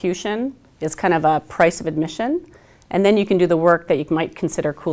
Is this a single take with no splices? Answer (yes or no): yes